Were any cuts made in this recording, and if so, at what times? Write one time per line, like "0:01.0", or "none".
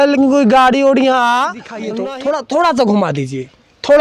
0:01.8